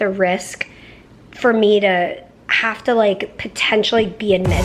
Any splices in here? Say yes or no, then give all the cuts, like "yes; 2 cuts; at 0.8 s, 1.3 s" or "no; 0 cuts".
no; 0 cuts